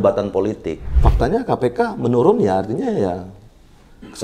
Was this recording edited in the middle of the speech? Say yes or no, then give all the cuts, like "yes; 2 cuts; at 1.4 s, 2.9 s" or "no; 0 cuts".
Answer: yes; 1 cut; at 1.0 s